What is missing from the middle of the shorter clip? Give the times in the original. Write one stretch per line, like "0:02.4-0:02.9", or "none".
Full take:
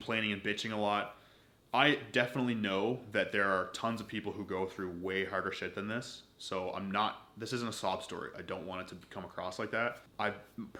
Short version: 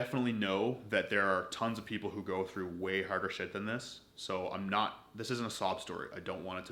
none